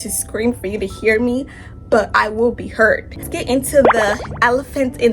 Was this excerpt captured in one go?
no; 1 cut; at 3.2 s

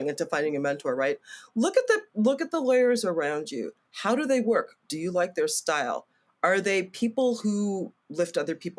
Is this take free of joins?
yes; 0 cuts

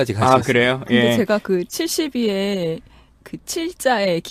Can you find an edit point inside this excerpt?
no; 0 cuts

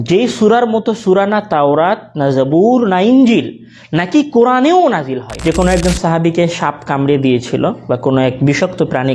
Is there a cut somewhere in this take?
yes; 1 cut; at 5.3 s

